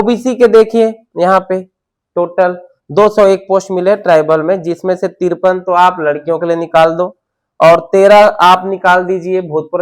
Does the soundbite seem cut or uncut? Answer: uncut